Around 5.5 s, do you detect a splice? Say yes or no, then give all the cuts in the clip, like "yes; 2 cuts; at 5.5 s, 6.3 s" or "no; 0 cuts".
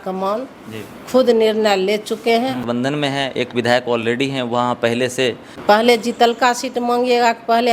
yes; 2 cuts; at 2.6 s, 5.5 s